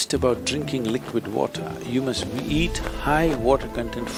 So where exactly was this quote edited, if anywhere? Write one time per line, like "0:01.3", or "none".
none